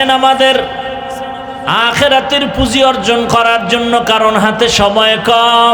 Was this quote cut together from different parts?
no; 0 cuts

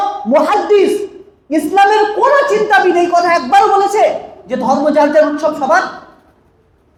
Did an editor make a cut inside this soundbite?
no; 0 cuts

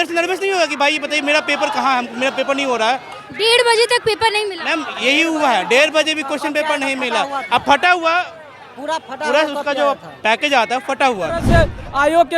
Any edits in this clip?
yes; 1 cut; at 11.5 s

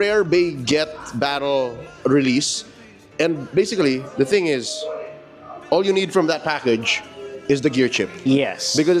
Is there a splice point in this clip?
no; 0 cuts

